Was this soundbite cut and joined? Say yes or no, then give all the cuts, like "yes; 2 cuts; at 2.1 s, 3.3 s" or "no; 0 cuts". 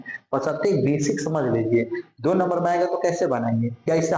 no; 0 cuts